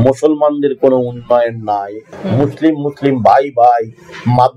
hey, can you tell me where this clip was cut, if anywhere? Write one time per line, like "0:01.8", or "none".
0:02.0